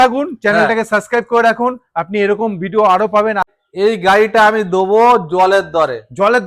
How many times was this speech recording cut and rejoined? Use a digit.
1